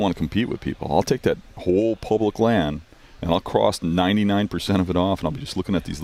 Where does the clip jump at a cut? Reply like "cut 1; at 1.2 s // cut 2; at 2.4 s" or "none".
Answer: none

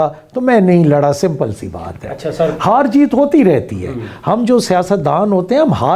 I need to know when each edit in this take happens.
none

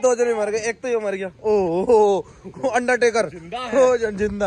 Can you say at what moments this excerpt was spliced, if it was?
none

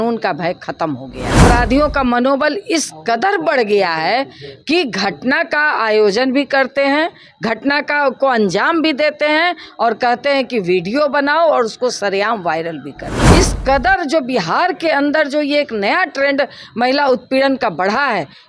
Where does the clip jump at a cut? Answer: cut 1; at 1.4 s // cut 2; at 13.1 s

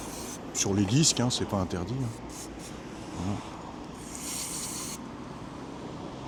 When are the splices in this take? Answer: none

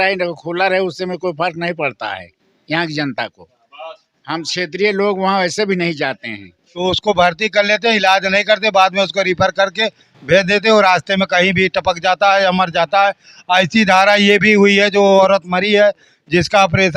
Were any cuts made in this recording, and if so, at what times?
cut 1; at 6.7 s

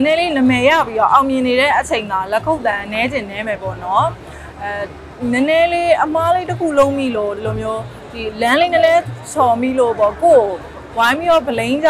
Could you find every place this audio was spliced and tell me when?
none

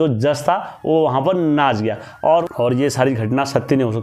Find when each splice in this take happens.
cut 1; at 2.4 s

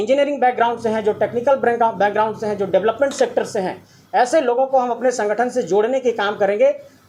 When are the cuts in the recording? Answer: none

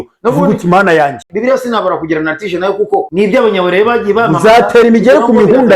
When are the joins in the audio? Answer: cut 1; at 1.2 s // cut 2; at 3.1 s

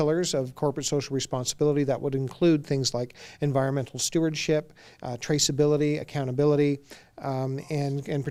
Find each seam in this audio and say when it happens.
none

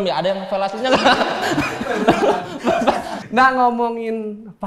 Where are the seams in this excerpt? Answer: none

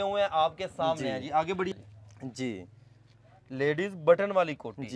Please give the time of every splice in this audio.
cut 1; at 1.7 s

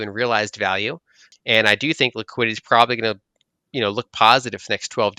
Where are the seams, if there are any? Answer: cut 1; at 1.3 s

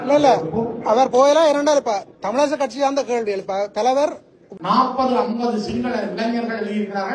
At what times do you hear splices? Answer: cut 1; at 4.4 s

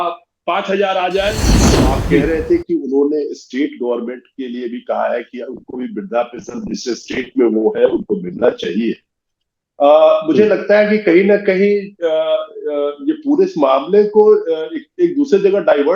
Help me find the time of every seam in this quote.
cut 1; at 1.7 s

